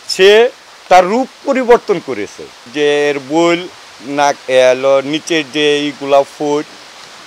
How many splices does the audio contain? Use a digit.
1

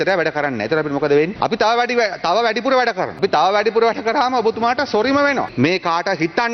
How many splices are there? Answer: 3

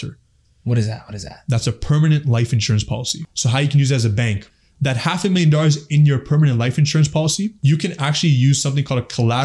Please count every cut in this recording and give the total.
3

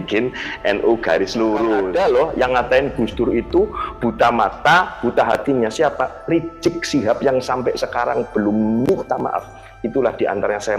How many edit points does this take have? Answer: 1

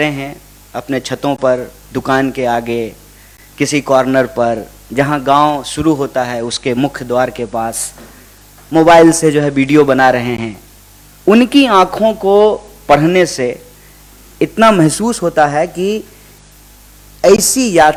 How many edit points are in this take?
0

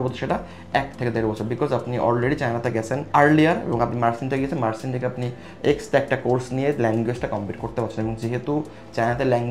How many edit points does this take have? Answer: 0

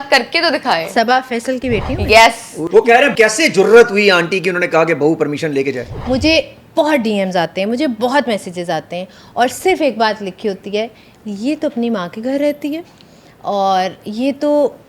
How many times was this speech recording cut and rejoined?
2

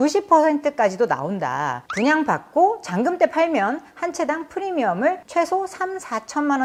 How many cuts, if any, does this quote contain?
0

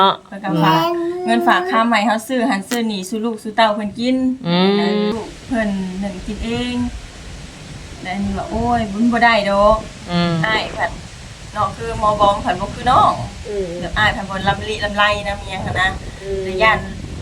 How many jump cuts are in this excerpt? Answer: 1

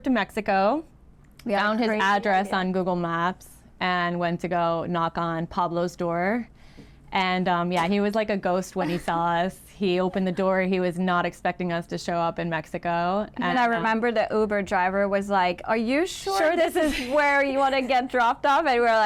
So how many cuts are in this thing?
0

